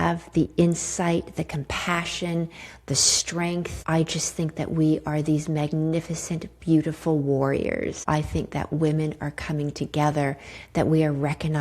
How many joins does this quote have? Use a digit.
2